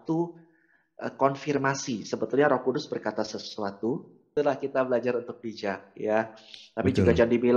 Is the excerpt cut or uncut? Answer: cut